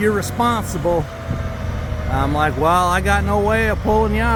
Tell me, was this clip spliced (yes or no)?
no